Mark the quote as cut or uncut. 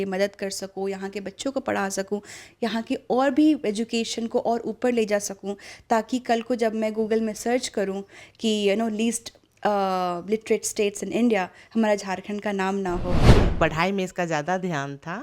cut